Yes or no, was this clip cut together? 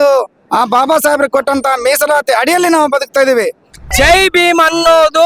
yes